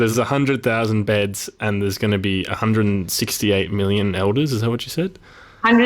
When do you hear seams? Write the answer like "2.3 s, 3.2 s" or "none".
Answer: 1.0 s